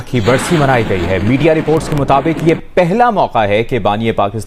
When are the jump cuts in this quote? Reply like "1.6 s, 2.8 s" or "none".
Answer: none